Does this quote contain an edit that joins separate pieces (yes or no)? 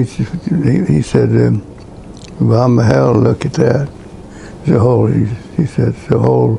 no